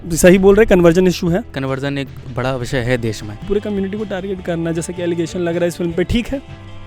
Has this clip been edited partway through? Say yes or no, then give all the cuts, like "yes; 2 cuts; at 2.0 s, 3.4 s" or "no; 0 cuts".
yes; 2 cuts; at 1.5 s, 3.4 s